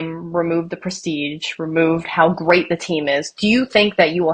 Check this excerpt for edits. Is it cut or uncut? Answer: uncut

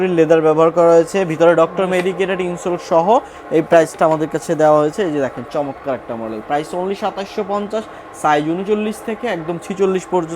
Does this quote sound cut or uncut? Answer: uncut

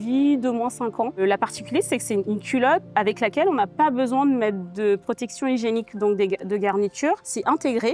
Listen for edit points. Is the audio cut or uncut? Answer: uncut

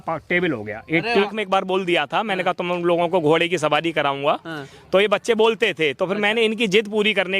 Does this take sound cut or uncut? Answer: cut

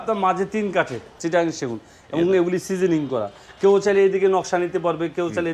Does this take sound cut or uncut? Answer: cut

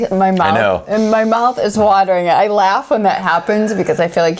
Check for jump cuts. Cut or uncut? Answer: uncut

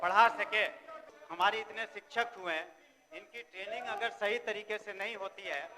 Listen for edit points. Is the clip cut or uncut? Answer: cut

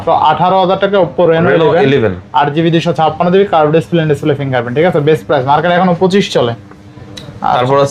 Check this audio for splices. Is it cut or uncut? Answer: uncut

